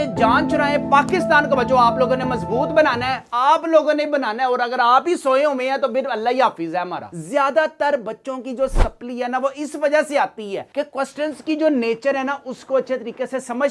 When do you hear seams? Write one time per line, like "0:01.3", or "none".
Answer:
0:07.1